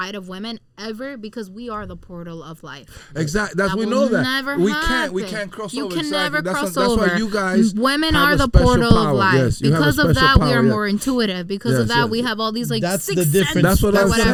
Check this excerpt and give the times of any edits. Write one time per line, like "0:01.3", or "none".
none